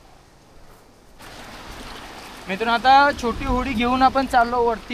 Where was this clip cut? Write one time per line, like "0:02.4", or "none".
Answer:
0:01.1